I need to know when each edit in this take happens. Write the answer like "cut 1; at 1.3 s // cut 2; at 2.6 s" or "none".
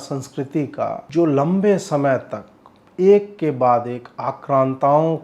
cut 1; at 1.0 s